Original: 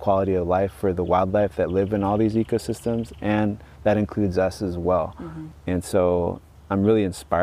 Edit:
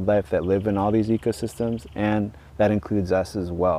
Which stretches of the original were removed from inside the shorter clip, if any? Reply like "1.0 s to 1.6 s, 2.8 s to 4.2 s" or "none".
none